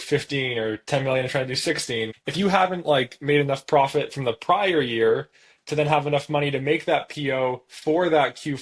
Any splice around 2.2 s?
yes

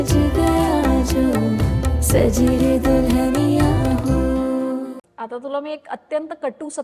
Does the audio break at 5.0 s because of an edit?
yes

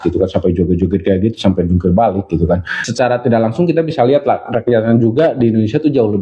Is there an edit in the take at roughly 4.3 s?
no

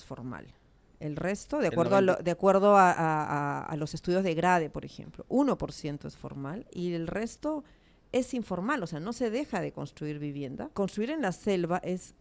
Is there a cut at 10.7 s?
yes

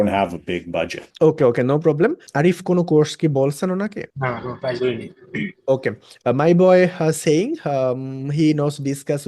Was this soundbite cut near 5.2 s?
no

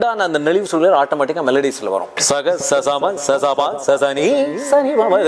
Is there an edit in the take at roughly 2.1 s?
yes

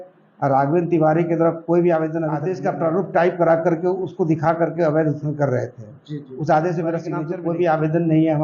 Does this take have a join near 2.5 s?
yes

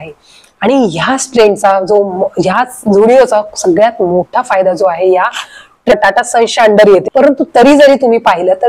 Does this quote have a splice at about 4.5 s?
no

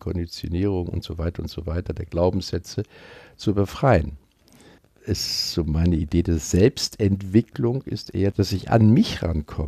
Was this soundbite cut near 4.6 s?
yes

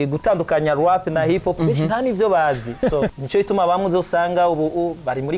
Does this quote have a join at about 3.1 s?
yes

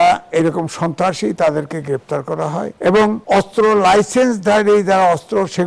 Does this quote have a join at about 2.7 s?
yes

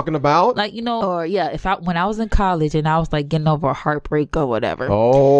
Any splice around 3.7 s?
no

